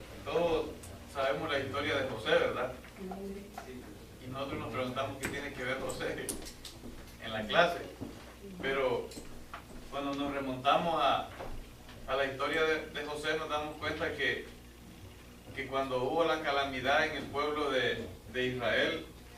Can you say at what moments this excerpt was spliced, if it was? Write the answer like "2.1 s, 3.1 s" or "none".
none